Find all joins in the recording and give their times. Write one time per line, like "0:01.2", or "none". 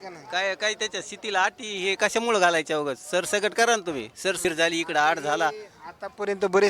0:04.4